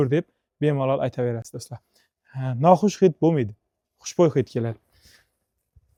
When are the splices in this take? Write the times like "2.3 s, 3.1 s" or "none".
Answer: none